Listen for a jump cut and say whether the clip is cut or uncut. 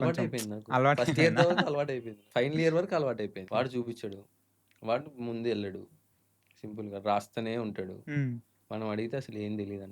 cut